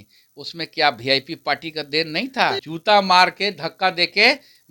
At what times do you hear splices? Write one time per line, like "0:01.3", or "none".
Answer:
0:02.7